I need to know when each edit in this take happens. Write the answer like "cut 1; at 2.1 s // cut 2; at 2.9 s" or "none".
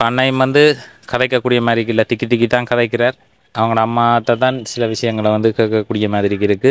none